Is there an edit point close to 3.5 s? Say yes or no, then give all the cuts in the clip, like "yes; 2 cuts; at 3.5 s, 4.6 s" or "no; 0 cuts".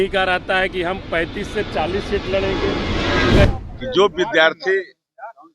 yes; 1 cut; at 3.5 s